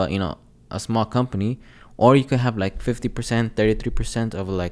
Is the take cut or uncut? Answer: uncut